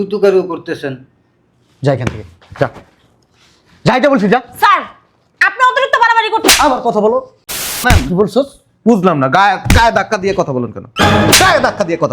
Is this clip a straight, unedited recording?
no; 1 cut; at 7.8 s

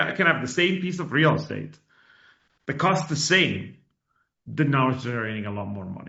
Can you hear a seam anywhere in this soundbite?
no; 0 cuts

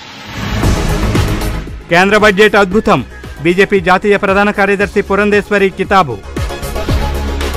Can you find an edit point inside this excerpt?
no; 0 cuts

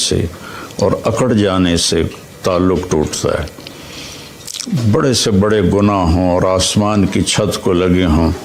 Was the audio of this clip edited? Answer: no; 0 cuts

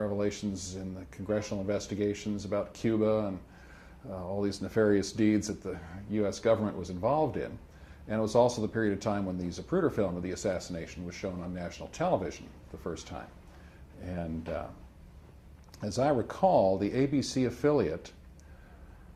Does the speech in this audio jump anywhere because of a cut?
no; 0 cuts

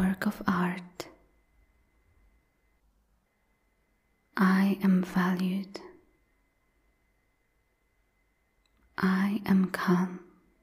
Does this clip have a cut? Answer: no; 0 cuts

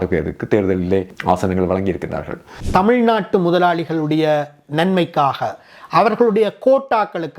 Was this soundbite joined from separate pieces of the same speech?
yes; 2 cuts; at 1.1 s, 2.5 s

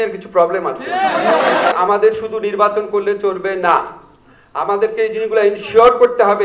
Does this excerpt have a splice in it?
yes; 1 cut; at 1.7 s

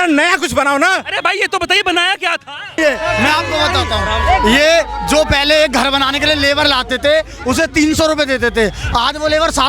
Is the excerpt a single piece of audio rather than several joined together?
no; 1 cut; at 2.8 s

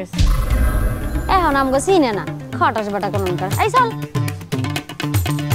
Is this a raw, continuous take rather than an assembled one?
no; 1 cut; at 3.9 s

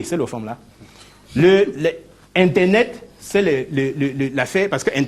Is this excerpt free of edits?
yes; 0 cuts

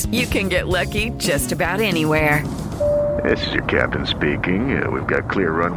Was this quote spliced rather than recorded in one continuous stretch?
no; 0 cuts

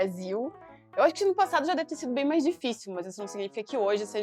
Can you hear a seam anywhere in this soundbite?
no; 0 cuts

